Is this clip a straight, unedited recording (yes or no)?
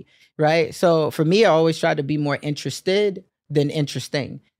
yes